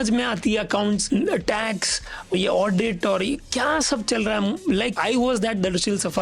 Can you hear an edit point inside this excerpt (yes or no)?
yes